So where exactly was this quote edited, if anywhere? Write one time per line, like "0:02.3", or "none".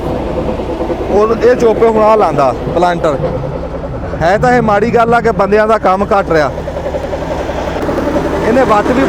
0:07.8